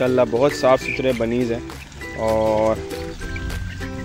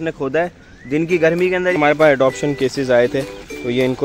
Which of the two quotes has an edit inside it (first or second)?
second